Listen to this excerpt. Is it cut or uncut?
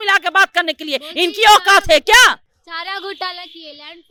uncut